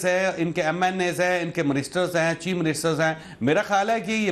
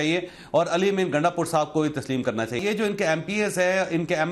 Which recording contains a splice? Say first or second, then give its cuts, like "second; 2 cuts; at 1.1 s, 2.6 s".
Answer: second; 1 cut; at 2.6 s